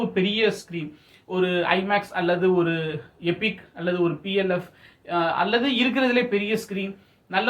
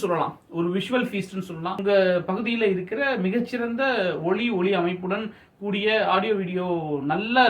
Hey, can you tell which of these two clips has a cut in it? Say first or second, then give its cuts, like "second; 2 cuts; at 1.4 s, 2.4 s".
second; 1 cut; at 1.8 s